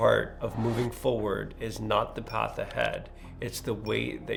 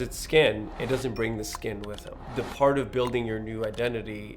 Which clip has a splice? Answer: second; 1 cut; at 2.1 s

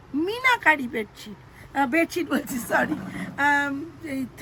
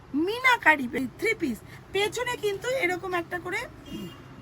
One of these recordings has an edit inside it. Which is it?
second; 1 cut; at 1.0 s

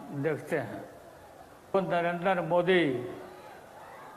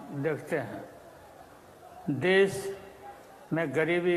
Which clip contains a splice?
first; 1 cut; at 1.7 s

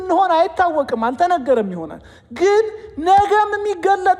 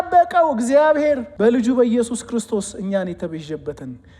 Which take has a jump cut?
second; 1 cut; at 1.3 s

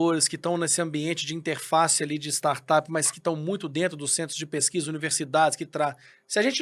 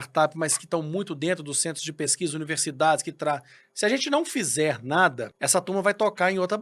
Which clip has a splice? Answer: second; 1 cut; at 5.3 s

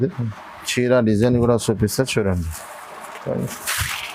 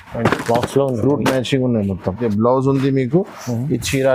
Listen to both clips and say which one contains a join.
second; 1 cut; at 2.2 s

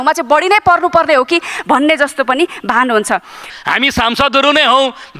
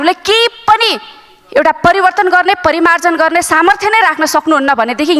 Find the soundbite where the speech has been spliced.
first; 1 cut; at 3.4 s

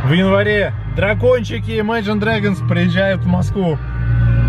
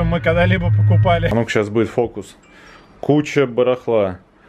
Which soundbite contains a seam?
second; 1 cut; at 1.3 s

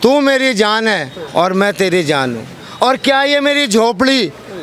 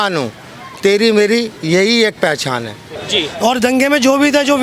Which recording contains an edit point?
second; 1 cut; at 3.0 s

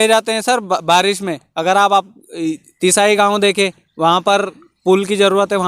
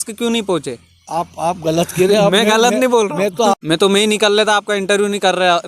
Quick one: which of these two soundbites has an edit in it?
second; 1 cut; at 3.5 s

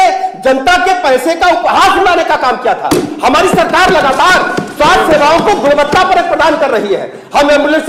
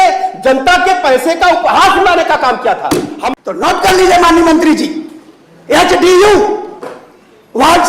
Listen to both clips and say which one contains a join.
second; 1 cut; at 3.2 s

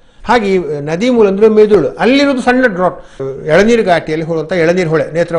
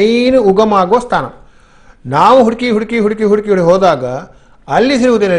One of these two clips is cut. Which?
first; 1 cut; at 3.2 s

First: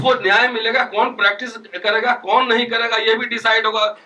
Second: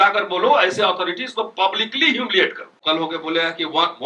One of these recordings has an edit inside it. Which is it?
second; 1 cut; at 2.8 s

